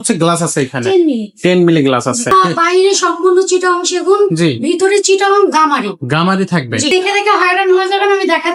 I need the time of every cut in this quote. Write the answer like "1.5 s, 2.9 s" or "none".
2.3 s, 6.9 s